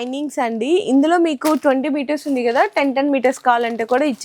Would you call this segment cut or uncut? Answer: uncut